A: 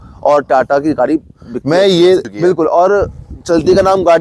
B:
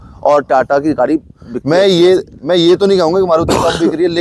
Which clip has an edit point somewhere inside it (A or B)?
A